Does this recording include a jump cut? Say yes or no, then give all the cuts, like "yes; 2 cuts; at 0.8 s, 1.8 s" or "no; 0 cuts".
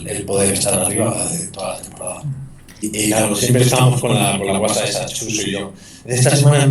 yes; 1 cut; at 2.9 s